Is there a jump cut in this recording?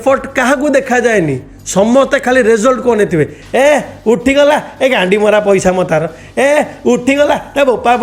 no; 0 cuts

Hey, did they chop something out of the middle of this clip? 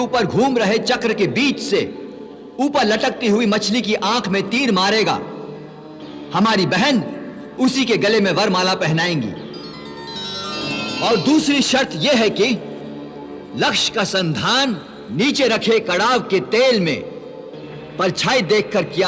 yes; 2 cuts; at 10.9 s, 14.9 s

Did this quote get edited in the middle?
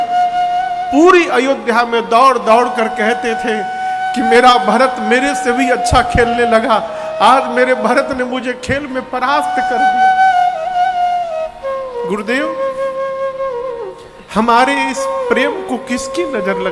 no; 0 cuts

